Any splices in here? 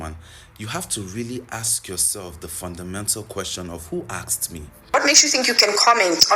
yes; 1 cut; at 4.9 s

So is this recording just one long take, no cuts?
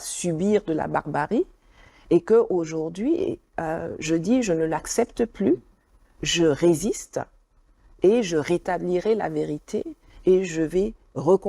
yes; 0 cuts

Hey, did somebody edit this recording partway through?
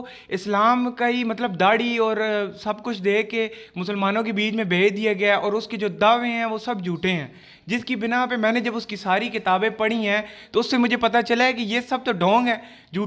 no; 0 cuts

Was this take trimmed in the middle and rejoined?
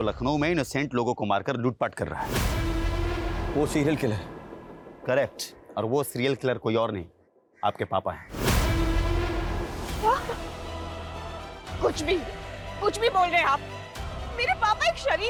no; 0 cuts

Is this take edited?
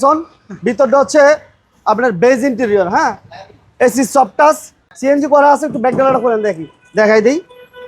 yes; 1 cut; at 4.9 s

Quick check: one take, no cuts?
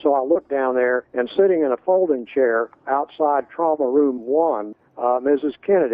no; 3 cuts; at 1.1 s, 2.8 s, 4.7 s

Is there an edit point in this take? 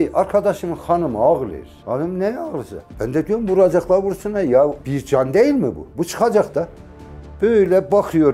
yes; 2 cuts; at 2.9 s, 7.2 s

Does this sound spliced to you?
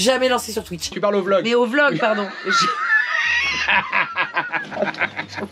yes; 1 cut; at 0.9 s

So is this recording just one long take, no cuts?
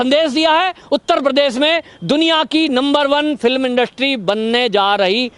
yes; 0 cuts

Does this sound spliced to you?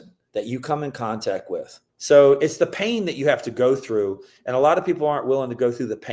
yes; 1 cut; at 1.8 s

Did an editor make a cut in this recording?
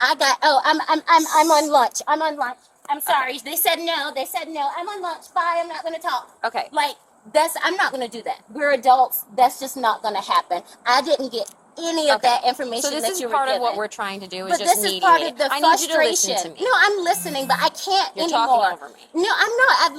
no; 0 cuts

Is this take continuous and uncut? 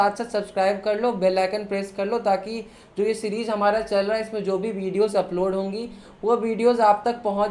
yes; 0 cuts

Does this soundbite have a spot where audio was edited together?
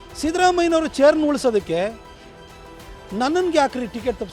no; 0 cuts

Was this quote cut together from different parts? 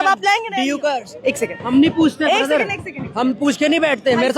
yes; 1 cut; at 1.1 s

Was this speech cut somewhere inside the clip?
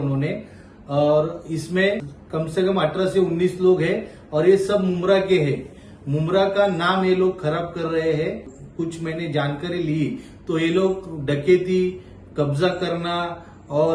no; 0 cuts

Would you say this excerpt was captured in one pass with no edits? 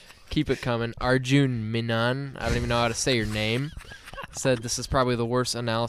yes; 0 cuts

